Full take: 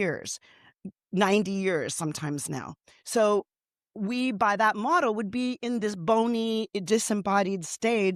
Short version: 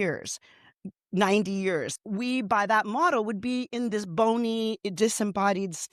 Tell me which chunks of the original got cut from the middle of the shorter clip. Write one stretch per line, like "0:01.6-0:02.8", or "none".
0:01.9-0:03.8